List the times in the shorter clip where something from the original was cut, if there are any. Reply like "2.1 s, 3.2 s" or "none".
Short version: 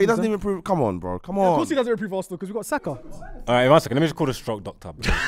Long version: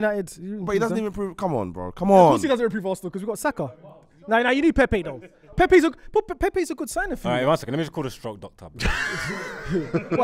3.4 s

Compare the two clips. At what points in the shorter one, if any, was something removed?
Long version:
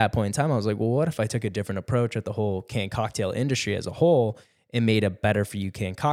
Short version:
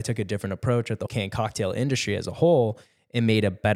1.1 s

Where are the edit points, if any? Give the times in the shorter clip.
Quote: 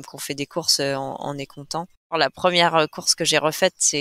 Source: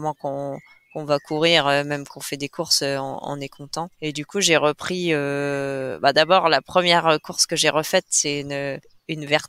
2.1 s

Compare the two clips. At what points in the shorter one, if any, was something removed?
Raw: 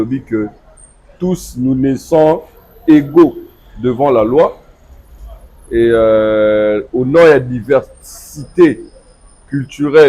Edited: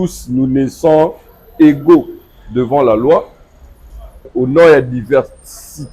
4.3 s

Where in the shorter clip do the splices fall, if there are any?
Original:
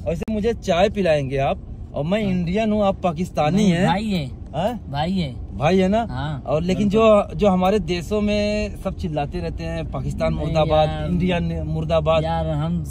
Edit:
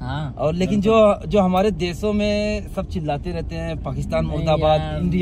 none

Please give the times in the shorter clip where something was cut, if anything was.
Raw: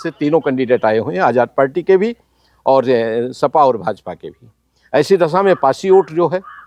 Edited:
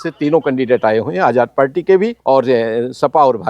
2.2 s

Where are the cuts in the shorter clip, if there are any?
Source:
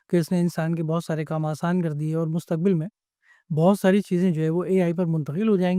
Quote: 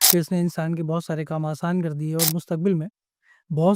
none

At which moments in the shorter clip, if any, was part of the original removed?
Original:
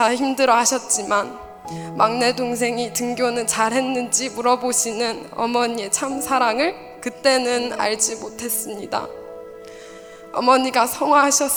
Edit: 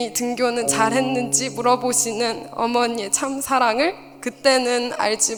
none

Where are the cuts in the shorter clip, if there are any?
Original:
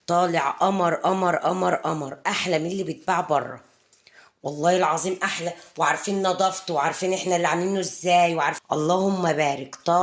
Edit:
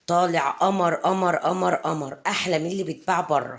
none

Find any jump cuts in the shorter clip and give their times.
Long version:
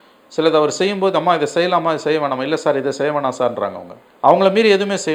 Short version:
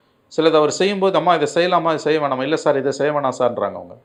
none

